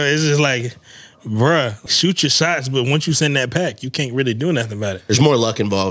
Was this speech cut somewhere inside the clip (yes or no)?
yes